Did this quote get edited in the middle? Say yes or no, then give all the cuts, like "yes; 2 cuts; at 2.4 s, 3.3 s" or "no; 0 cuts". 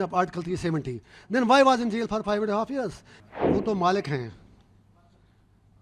yes; 1 cut; at 3.1 s